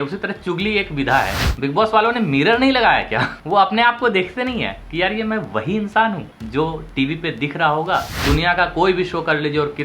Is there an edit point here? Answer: yes; 5 cuts; at 1.4 s, 3.4 s, 4.8 s, 6.3 s, 8.1 s

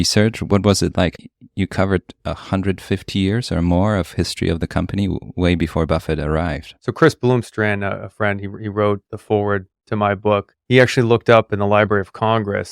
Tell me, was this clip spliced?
yes; 2 cuts; at 1.1 s, 6.7 s

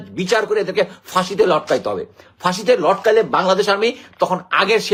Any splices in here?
no; 0 cuts

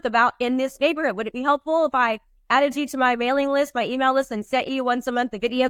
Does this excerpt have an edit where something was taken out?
no; 0 cuts

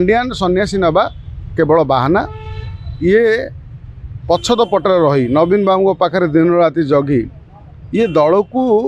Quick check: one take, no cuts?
yes; 0 cuts

